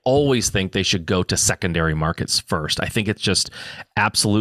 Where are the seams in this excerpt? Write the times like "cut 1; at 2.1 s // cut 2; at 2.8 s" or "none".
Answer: none